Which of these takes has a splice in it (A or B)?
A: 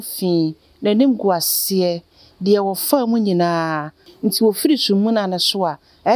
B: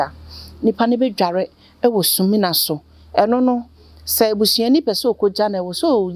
A